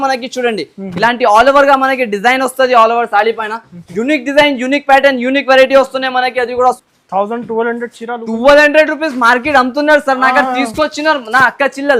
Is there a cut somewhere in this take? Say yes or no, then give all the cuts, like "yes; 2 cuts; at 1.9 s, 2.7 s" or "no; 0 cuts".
yes; 1 cut; at 6.8 s